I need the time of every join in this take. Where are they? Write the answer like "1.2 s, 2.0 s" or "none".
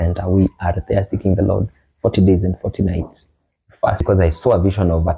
4.0 s